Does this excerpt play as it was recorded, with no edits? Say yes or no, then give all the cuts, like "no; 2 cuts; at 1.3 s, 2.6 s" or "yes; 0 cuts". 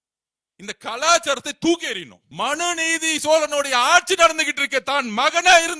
no; 1 cut; at 2.2 s